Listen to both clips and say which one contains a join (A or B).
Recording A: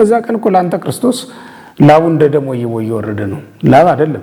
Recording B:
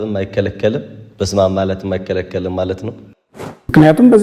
B